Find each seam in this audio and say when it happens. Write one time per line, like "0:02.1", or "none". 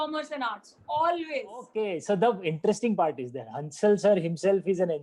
0:01.8